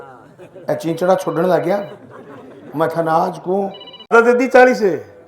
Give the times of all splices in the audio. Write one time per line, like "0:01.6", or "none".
0:04.1